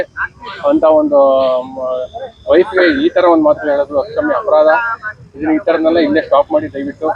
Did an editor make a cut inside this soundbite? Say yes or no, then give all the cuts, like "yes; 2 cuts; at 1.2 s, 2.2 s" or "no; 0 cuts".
no; 0 cuts